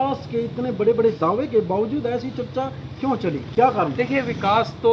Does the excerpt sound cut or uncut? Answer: uncut